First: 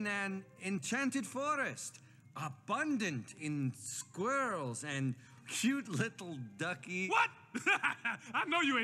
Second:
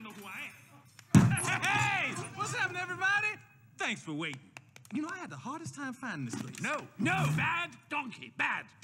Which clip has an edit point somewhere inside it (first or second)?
first